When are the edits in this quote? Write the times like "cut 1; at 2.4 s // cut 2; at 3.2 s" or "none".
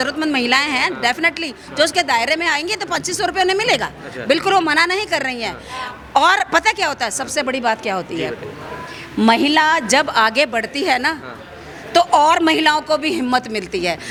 none